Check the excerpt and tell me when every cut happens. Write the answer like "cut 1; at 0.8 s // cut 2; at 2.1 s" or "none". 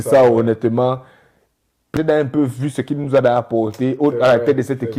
cut 1; at 1.9 s